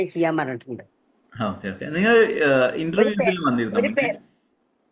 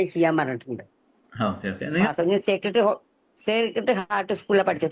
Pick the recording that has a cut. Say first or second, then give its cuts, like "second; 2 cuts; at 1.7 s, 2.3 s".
second; 1 cut; at 2.1 s